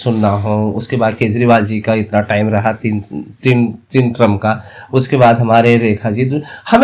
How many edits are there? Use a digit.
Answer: 0